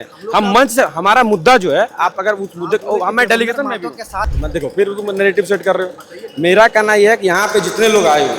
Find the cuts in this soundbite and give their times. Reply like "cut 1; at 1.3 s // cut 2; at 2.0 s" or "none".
cut 1; at 4.3 s